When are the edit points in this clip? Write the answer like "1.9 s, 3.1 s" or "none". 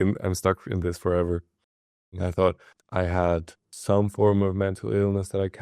2.1 s, 2.7 s, 3.7 s